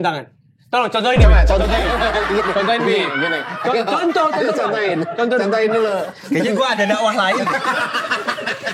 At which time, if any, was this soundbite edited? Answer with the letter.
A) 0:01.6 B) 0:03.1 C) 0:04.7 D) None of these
D